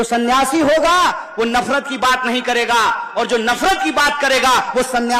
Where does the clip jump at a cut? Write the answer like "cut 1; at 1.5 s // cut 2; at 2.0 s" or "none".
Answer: none

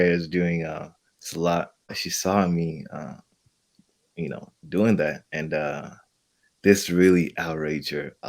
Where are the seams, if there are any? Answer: cut 1; at 2.1 s

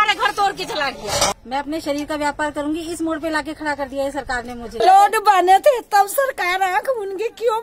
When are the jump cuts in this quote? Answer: cut 1; at 1.3 s // cut 2; at 4.8 s

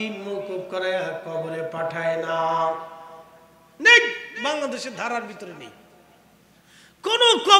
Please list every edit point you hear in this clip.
none

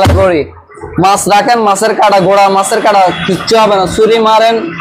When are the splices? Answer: none

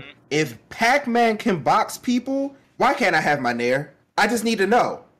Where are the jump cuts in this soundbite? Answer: cut 1; at 2.6 s

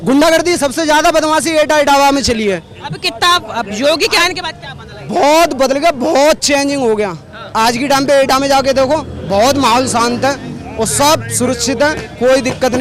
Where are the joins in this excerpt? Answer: none

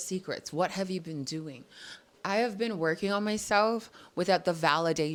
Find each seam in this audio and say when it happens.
none

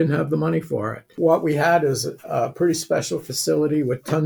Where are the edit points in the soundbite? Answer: cut 1; at 1.1 s

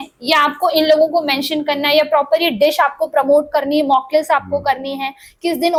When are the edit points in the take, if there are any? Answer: none

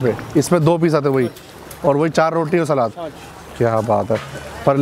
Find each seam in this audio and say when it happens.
none

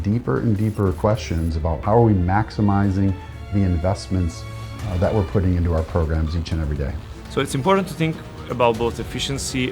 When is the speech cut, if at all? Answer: cut 1; at 1.8 s // cut 2; at 7.1 s

